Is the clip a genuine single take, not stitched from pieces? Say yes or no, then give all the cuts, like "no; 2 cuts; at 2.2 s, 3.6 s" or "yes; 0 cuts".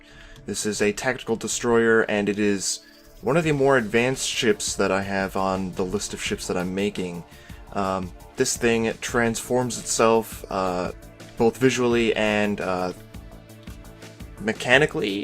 no; 1 cut; at 4.9 s